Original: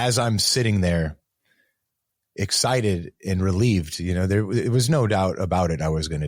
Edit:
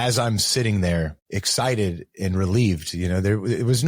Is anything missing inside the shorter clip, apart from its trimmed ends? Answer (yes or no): yes